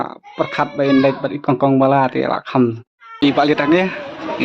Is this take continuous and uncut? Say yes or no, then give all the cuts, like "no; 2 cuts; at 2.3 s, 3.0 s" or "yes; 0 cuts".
no; 1 cut; at 3.2 s